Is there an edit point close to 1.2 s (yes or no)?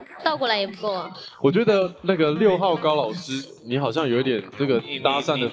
yes